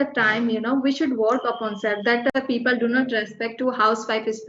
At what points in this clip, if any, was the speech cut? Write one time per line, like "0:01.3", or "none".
0:02.3

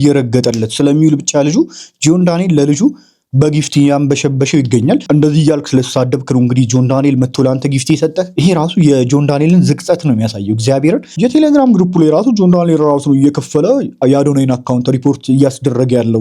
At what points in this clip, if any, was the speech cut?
0:05.1
0:08.4
0:11.2

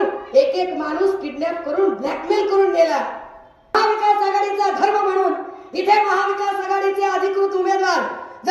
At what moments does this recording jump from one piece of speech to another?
0:03.7

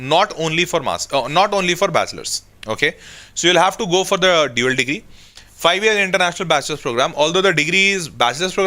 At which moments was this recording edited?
none

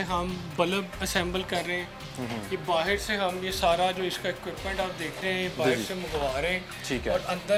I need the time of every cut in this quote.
none

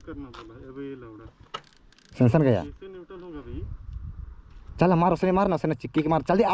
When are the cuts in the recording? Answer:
none

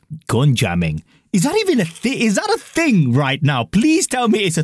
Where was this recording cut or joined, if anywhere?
none

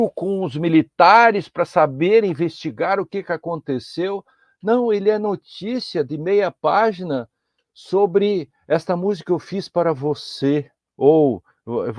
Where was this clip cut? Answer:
0:10.8

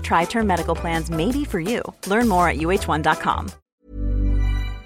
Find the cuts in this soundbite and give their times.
0:03.5

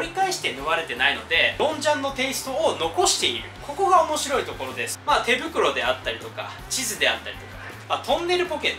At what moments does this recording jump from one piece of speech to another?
0:01.6
0:04.9
0:07.8

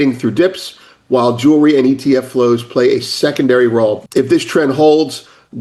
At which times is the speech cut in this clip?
0:04.0

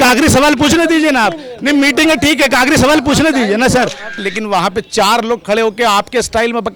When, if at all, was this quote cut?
0:04.3

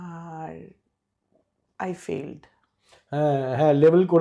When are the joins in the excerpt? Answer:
none

